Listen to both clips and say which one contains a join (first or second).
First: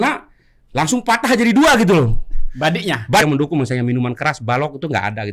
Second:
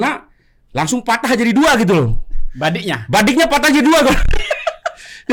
first